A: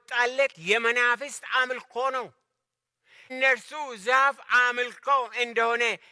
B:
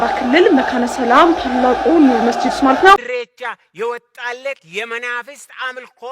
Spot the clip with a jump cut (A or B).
B